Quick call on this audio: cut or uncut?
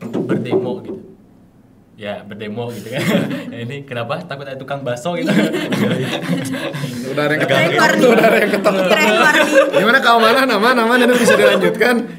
uncut